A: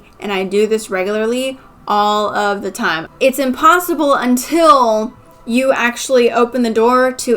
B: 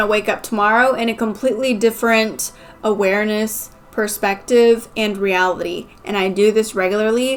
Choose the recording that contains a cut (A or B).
A